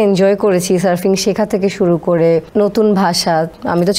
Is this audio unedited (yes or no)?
no